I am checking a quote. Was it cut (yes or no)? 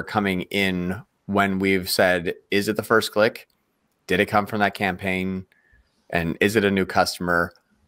no